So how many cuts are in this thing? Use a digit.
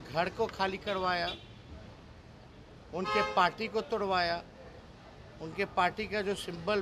0